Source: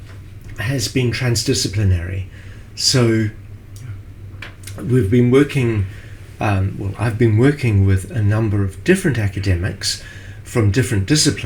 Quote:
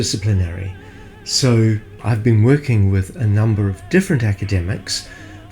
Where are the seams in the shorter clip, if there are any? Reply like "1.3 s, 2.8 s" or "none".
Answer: 1.9 s